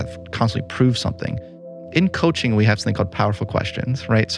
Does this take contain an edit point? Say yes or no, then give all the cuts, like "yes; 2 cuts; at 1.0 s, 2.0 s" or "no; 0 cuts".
yes; 1 cut; at 1.7 s